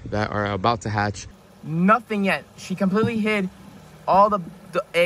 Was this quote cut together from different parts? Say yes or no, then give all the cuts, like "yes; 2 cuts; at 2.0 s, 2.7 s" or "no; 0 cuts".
yes; 1 cut; at 1.3 s